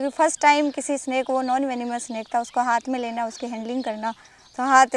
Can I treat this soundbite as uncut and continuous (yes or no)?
yes